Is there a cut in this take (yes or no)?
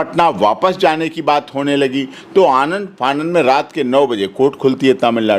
no